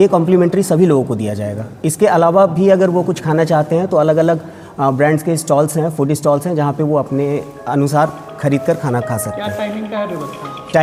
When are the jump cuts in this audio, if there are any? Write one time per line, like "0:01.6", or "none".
none